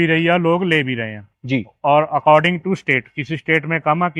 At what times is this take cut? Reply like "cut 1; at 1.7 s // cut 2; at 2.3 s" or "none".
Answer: none